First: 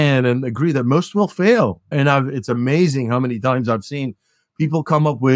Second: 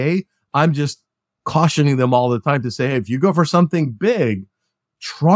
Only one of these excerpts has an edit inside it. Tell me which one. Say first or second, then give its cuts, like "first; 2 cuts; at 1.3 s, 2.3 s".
first; 1 cut; at 1.8 s